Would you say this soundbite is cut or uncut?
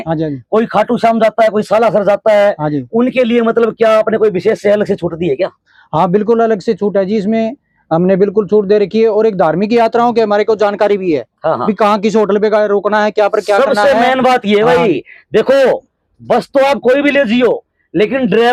uncut